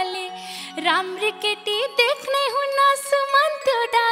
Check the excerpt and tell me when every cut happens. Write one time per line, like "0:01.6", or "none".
none